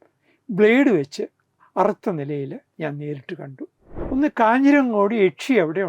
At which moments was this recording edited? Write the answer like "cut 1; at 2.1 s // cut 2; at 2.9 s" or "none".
cut 1; at 3.9 s